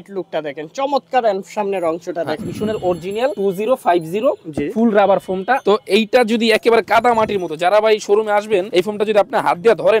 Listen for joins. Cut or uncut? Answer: cut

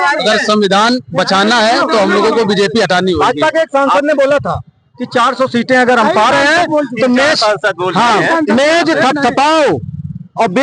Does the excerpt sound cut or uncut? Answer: uncut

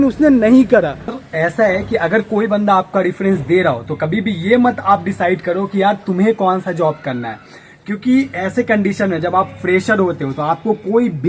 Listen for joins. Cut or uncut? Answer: uncut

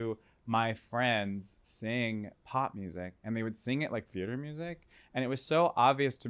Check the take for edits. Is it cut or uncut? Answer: uncut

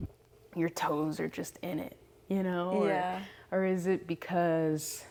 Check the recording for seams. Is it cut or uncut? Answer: uncut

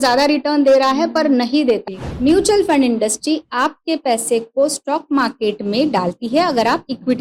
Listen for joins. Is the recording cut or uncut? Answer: cut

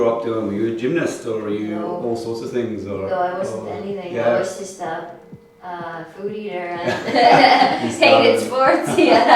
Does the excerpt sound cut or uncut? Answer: uncut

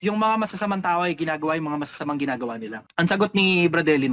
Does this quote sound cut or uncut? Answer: cut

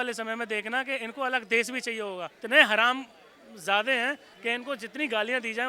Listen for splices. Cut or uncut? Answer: cut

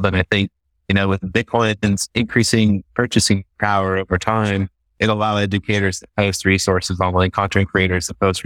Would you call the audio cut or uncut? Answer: cut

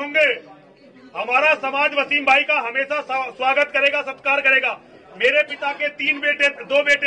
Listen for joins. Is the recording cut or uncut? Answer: uncut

